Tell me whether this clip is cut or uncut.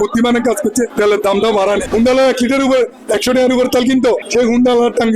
cut